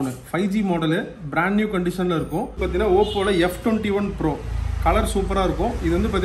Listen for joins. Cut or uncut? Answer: cut